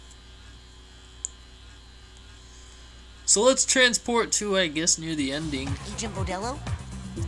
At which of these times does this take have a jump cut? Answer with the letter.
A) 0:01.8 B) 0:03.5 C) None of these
B